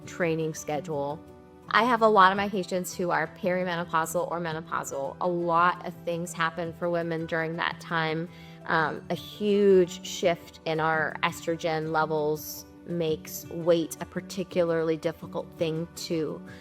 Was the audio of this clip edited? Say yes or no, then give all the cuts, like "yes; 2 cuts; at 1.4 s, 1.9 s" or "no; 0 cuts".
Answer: yes; 1 cut; at 1.6 s